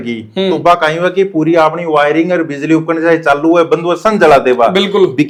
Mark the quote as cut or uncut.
uncut